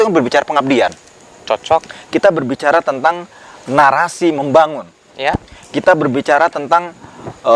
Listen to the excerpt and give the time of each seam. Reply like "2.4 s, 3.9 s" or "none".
none